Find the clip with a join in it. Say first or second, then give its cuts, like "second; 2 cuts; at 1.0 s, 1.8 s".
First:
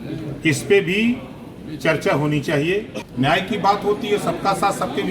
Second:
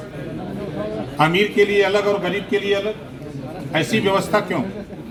first; 1 cut; at 3.0 s